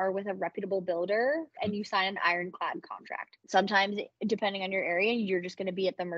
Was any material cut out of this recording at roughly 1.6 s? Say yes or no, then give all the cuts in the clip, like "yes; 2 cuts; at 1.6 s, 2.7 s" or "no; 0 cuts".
yes; 2 cuts; at 1.6 s, 3.3 s